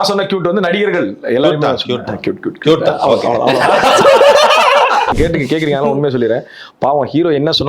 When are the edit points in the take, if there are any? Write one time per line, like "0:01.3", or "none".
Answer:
0:05.1